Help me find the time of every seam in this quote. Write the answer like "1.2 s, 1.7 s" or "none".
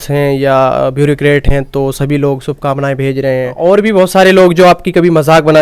3.5 s